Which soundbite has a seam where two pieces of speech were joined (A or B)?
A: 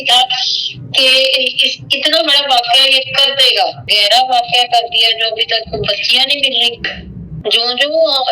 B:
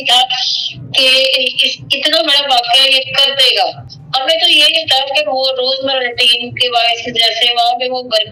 A